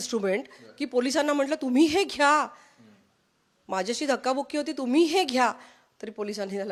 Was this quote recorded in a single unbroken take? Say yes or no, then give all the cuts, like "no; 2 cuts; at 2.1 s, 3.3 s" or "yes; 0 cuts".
yes; 0 cuts